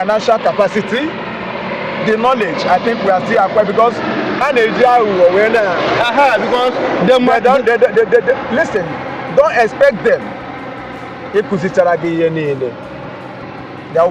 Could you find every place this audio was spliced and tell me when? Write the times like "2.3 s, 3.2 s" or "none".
none